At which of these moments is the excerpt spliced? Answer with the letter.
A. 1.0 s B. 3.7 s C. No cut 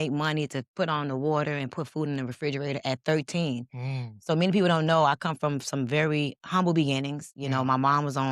C